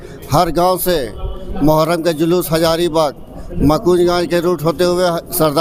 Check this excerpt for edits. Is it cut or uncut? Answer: uncut